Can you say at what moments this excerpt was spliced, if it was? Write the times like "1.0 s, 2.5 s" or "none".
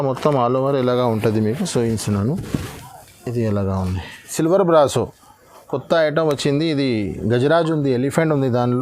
4.3 s